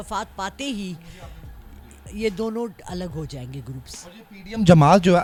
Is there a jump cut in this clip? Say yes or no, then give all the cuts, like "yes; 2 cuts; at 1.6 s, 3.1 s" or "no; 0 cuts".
no; 0 cuts